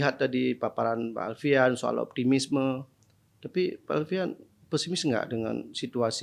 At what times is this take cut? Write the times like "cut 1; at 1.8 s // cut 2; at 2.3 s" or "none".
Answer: none

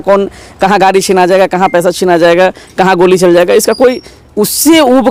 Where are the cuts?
none

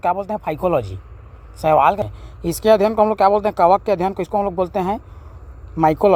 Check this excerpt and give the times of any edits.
cut 1; at 2.1 s

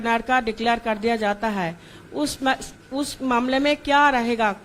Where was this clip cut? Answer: none

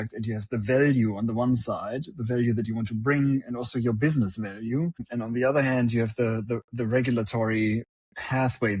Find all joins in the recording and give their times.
none

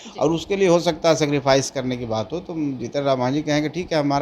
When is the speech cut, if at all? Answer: none

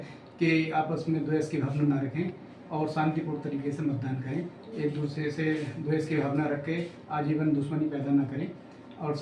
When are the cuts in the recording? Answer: none

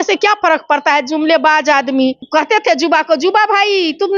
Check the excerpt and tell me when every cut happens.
cut 1; at 2.2 s

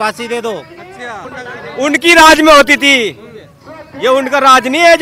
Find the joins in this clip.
cut 1; at 1.2 s

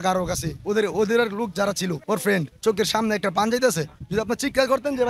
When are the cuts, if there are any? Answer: cut 1; at 2.2 s

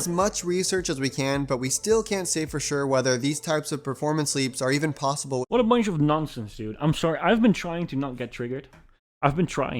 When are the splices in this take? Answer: none

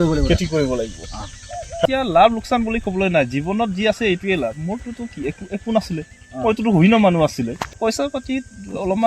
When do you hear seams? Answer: cut 1; at 1.9 s // cut 2; at 7.7 s

